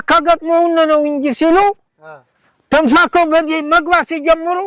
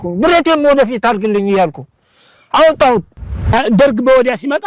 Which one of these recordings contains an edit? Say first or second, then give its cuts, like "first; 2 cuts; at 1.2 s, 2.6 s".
second; 1 cut; at 3.2 s